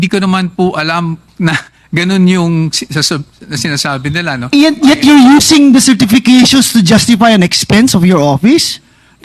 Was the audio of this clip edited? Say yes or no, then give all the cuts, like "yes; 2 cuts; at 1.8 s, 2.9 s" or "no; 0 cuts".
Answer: no; 0 cuts